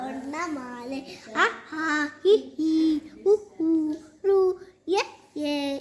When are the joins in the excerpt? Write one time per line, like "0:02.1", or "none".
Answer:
none